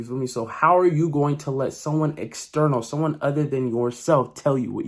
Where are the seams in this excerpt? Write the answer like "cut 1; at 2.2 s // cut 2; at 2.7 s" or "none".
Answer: none